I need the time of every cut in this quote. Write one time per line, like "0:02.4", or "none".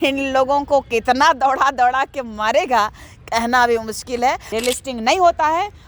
0:04.5